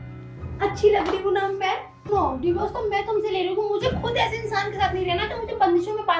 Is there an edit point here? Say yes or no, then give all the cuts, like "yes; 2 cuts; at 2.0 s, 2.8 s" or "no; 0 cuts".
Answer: yes; 1 cut; at 2.1 s